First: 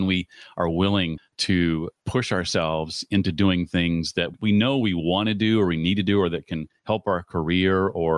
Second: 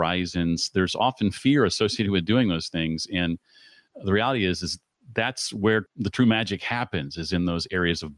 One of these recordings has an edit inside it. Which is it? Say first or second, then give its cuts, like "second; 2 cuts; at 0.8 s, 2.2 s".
first; 1 cut; at 1.3 s